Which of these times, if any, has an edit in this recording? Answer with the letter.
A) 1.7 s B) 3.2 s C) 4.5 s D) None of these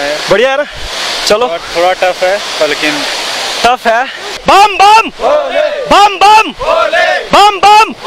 C